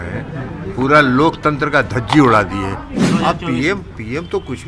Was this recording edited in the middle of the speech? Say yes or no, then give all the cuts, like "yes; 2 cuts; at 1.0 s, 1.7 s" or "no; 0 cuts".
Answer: yes; 1 cut; at 2.9 s